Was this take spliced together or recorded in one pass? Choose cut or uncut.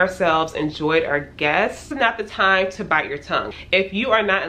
cut